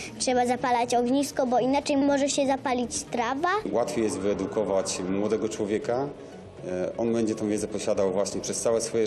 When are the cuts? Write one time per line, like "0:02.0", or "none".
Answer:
0:02.0
0:03.7